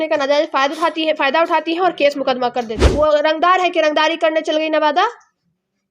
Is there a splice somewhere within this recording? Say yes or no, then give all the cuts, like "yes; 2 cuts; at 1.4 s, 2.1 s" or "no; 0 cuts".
yes; 1 cut; at 2.8 s